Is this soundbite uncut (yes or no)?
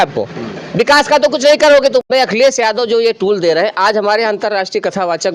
no